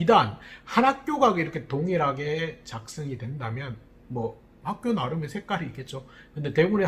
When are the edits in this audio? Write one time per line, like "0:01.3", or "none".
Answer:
none

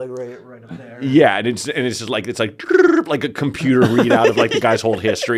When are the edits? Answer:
none

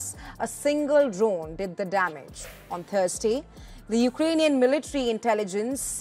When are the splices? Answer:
0:02.3

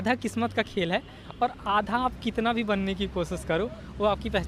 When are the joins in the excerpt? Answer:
none

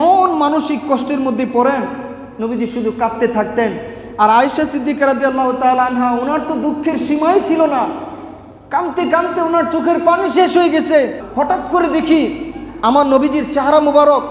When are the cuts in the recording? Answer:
0:11.2

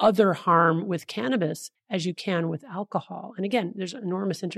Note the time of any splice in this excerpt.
0:01.7

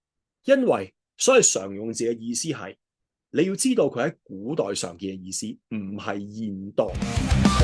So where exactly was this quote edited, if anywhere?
none

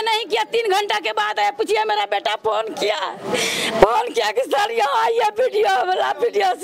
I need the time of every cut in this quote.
none

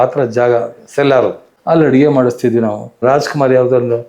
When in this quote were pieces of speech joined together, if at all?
0:01.5
0:03.0

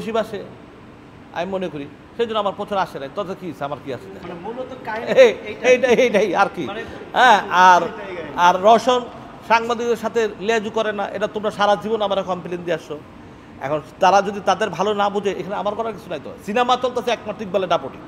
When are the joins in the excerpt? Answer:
none

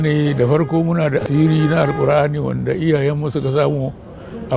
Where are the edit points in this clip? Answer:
0:01.3

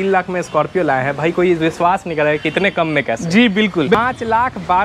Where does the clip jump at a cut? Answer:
0:03.9

